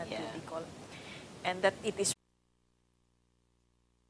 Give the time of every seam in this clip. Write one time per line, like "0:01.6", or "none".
none